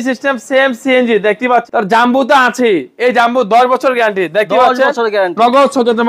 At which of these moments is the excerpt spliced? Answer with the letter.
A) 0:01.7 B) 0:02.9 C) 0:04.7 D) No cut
A